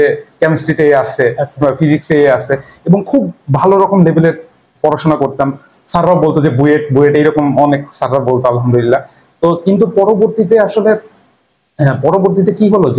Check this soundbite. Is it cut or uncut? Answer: uncut